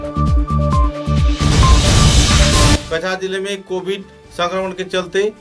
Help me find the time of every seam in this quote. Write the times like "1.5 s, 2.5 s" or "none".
none